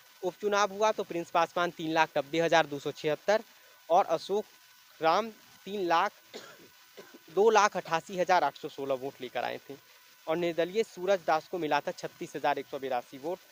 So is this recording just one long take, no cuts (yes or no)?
yes